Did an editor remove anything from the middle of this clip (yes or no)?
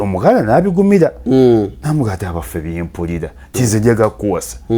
yes